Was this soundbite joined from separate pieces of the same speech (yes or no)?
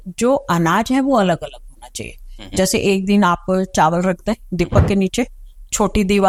no